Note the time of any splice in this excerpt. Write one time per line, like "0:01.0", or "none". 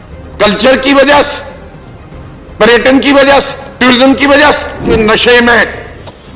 0:04.9